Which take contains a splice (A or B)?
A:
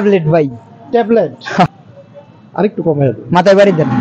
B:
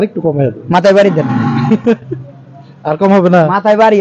A